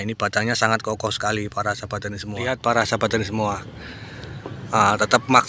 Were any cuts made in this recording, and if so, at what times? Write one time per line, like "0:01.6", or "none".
0:02.4